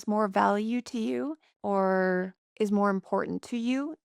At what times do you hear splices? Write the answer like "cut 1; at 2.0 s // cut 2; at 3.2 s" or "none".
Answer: cut 1; at 1.5 s // cut 2; at 2.4 s